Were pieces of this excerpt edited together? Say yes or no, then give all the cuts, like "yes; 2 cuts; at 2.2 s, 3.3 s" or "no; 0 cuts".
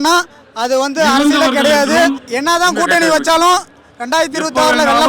yes; 1 cut; at 2.3 s